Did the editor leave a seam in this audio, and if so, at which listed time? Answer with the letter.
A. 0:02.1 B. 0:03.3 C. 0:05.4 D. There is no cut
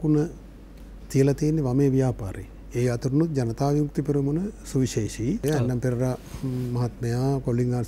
C